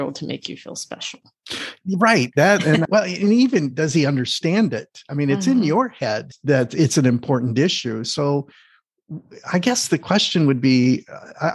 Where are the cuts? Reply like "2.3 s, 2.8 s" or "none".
2.9 s, 6.3 s